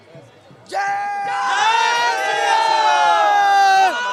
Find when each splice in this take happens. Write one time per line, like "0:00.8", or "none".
none